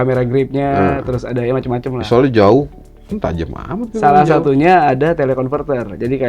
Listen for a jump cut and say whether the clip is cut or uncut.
uncut